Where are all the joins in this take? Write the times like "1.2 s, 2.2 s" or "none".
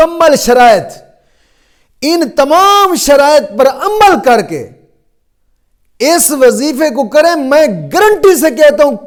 none

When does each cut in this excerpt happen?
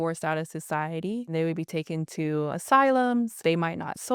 1.3 s, 2.6 s, 3.4 s

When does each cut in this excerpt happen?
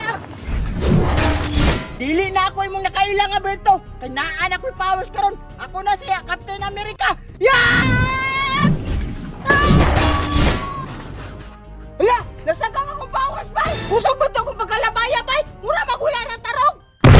1.9 s

